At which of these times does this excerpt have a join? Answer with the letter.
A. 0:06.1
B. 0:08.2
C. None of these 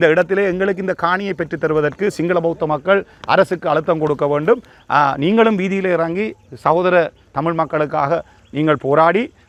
C